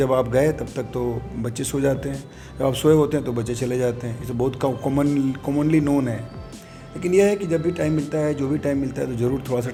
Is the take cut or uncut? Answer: uncut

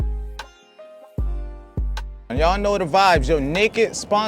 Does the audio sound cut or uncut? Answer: cut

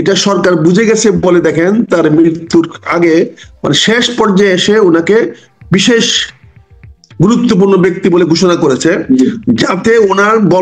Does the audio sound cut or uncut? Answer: uncut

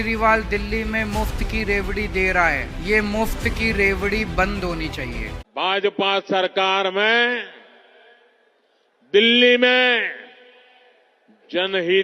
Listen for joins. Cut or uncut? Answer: cut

